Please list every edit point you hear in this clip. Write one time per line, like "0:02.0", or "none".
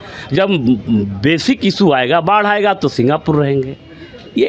none